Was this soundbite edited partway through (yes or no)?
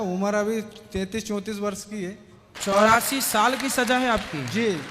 yes